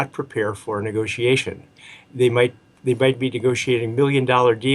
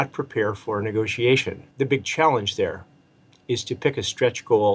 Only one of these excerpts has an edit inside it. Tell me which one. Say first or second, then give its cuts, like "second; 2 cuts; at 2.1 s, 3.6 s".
second; 1 cut; at 1.6 s